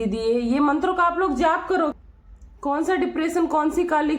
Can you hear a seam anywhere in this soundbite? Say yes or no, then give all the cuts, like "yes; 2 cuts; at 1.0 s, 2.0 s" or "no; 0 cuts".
yes; 1 cut; at 1.9 s